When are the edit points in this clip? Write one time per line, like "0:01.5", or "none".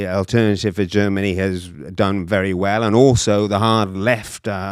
none

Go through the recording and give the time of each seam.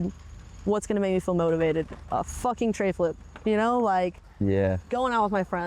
none

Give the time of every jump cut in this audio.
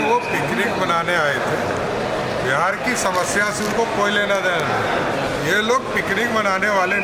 0:05.3

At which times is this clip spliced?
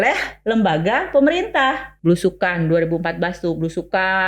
0:01.9

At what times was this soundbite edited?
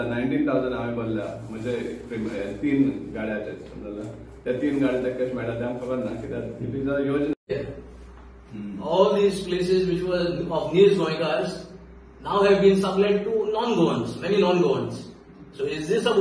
0:07.5

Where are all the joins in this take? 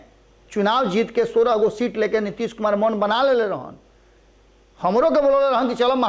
none

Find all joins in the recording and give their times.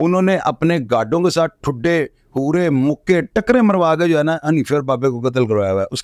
none

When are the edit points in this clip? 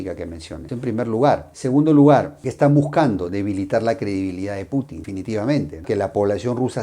0:05.8

